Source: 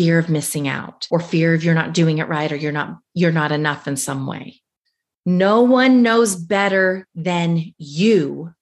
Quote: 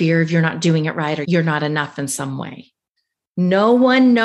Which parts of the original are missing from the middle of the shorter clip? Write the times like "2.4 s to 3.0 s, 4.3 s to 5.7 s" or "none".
2.6 s to 3.1 s